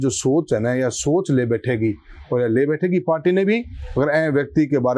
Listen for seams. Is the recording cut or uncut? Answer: uncut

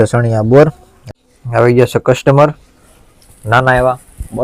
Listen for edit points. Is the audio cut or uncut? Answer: cut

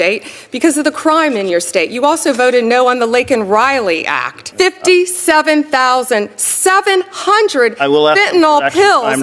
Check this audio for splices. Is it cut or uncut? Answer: cut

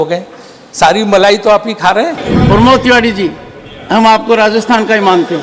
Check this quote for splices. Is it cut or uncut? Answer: cut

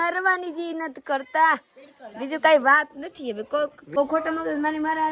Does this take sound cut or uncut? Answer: cut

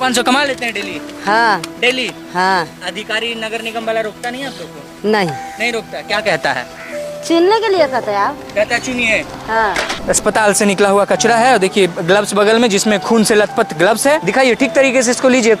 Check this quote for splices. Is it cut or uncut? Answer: cut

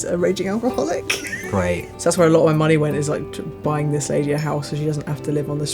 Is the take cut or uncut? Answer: cut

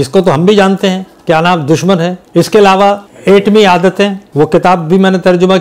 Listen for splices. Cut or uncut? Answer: cut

